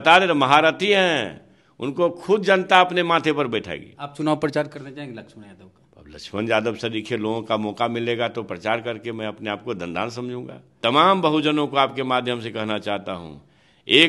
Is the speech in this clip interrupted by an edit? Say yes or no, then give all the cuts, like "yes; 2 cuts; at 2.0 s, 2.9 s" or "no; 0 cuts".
yes; 1 cut; at 10.6 s